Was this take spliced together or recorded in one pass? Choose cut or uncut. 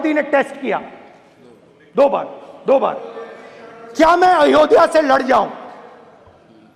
uncut